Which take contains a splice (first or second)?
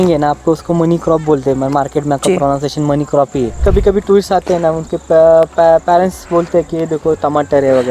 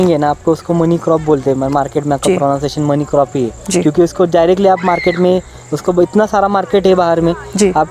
first